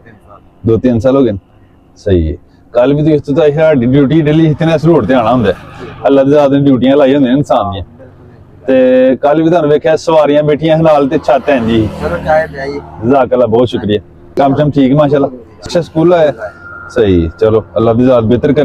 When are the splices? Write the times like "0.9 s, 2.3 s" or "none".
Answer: 14.2 s, 15.7 s